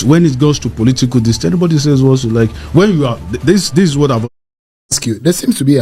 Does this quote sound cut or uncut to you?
cut